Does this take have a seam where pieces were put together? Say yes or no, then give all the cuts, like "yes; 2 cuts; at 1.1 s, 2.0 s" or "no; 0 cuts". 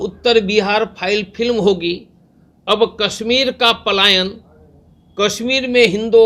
no; 0 cuts